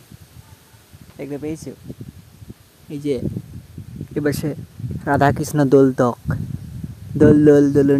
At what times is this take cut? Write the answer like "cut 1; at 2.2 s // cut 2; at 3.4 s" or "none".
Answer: none

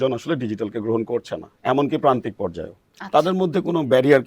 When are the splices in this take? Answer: none

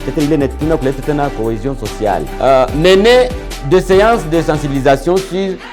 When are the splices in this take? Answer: cut 1; at 2.3 s

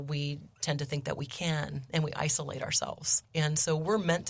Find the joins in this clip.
cut 1; at 3.1 s

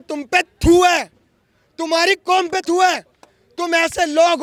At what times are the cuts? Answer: none

